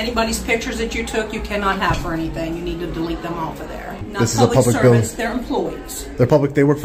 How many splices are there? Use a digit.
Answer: 1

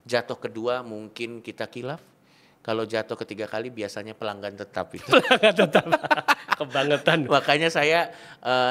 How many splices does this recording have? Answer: 0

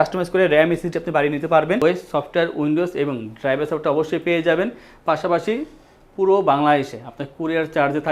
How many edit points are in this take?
1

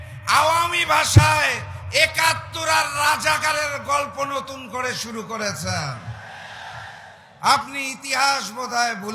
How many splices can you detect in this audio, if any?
0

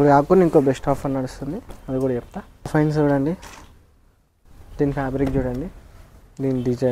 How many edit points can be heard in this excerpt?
1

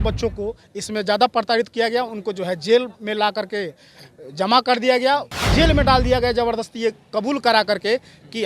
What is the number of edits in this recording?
1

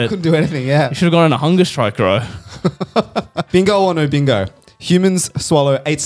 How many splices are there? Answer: 1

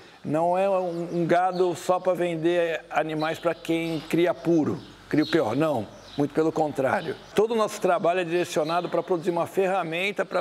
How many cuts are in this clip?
1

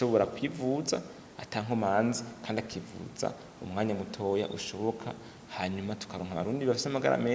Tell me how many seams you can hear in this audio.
0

